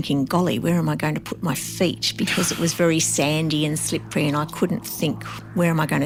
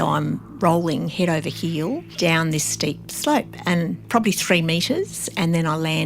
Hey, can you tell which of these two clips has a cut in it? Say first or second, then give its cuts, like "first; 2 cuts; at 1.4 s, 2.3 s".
second; 2 cuts; at 2.1 s, 4.0 s